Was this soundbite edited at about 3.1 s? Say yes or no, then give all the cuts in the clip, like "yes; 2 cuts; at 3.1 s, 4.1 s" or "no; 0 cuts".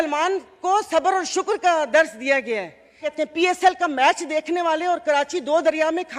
yes; 1 cut; at 3.1 s